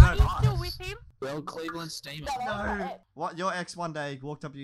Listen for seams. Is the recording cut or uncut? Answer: cut